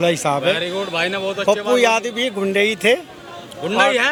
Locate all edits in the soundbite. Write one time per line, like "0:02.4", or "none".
none